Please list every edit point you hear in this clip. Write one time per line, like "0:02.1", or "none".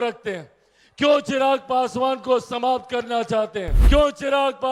0:03.7

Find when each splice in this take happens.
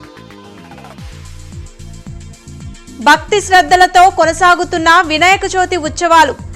0:02.7

